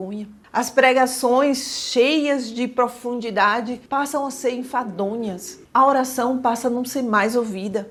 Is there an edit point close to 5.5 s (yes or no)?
no